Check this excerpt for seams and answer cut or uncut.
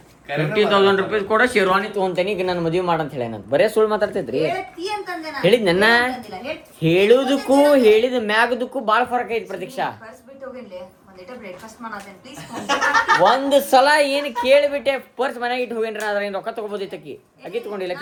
uncut